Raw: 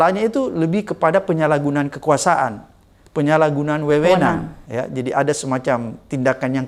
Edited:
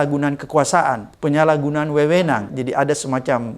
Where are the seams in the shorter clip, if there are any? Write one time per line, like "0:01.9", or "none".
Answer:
0:01.1
0:02.5